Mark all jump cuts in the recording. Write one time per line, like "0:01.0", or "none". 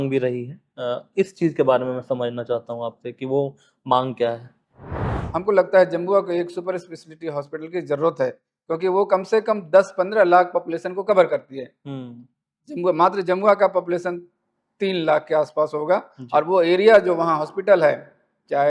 0:05.1